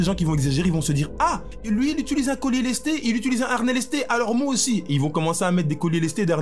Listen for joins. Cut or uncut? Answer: cut